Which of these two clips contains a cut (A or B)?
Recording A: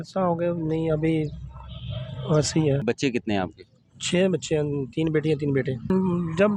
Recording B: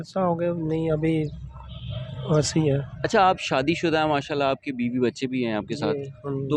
A